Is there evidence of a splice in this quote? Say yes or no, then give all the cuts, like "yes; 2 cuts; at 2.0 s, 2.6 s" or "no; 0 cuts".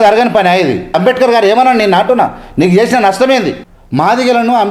yes; 2 cuts; at 0.9 s, 3.8 s